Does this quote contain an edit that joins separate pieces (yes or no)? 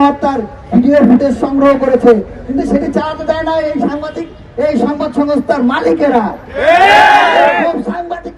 no